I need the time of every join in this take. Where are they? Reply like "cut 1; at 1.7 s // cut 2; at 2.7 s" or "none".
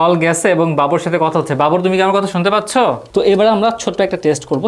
cut 1; at 3.0 s